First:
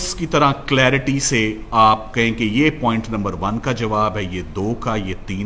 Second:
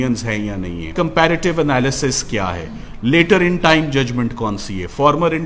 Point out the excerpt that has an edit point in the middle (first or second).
second